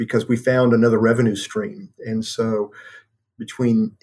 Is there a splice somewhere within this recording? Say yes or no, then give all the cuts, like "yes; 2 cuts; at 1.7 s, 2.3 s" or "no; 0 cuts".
no; 0 cuts